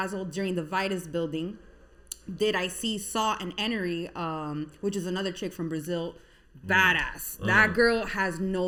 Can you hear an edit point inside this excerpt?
no; 0 cuts

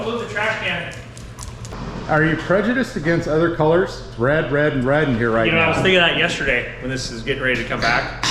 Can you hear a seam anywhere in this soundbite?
yes; 1 cut; at 1.7 s

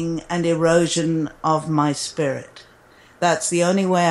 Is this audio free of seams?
yes; 0 cuts

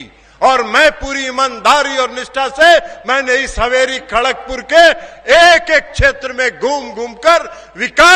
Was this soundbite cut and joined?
no; 0 cuts

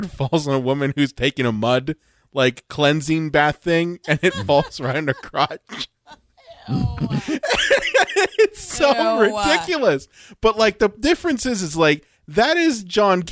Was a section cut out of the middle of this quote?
no; 0 cuts

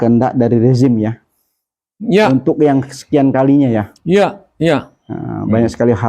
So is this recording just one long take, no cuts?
yes; 0 cuts

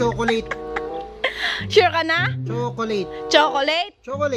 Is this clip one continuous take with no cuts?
yes; 0 cuts

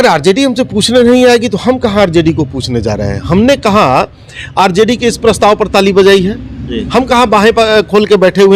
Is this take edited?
no; 0 cuts

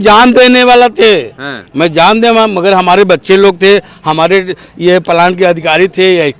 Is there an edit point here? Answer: no; 0 cuts

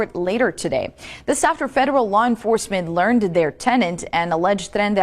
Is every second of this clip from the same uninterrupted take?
yes; 0 cuts

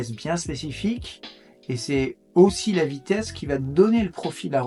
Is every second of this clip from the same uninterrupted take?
yes; 0 cuts

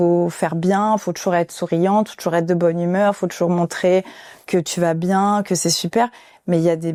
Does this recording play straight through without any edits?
yes; 0 cuts

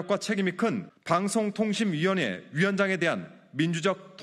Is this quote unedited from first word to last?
no; 1 cut; at 0.9 s

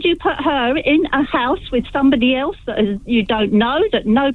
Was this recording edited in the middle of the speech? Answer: no; 0 cuts

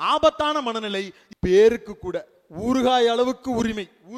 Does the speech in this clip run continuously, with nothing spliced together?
no; 1 cut; at 1.2 s

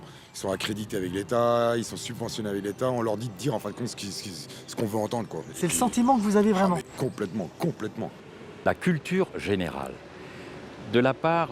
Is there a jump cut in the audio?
yes; 1 cut; at 8.4 s

